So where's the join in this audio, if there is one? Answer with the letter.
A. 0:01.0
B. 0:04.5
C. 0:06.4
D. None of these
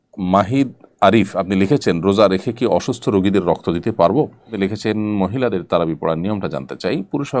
B